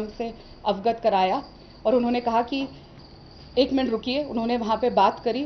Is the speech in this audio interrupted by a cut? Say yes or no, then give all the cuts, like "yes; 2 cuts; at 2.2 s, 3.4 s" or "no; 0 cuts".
no; 0 cuts